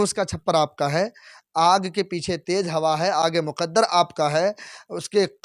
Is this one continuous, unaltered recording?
yes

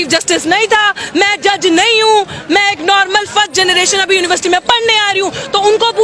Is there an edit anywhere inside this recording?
no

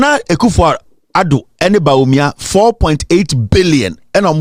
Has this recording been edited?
no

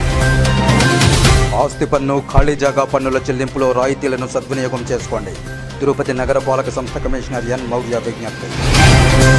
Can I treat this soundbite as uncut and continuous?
no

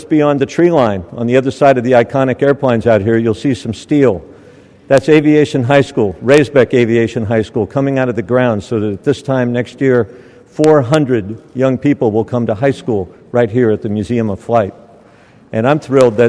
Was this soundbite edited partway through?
no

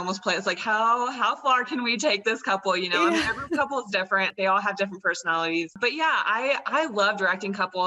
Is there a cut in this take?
yes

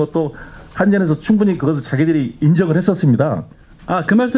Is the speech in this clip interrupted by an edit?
no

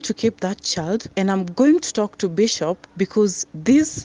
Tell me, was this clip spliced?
yes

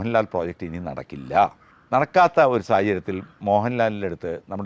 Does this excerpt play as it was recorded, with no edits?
no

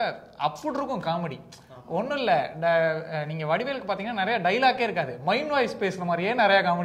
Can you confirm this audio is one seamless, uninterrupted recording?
yes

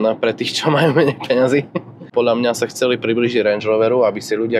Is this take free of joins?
yes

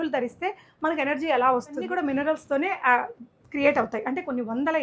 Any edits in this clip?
yes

